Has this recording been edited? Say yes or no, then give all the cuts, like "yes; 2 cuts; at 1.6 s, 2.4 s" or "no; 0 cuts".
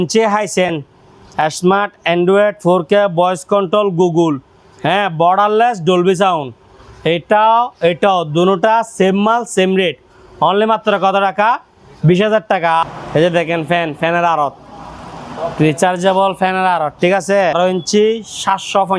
yes; 2 cuts; at 12.8 s, 17.5 s